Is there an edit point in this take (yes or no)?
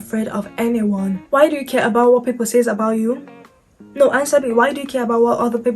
yes